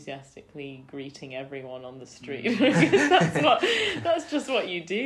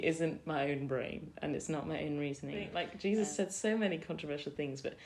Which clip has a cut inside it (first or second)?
second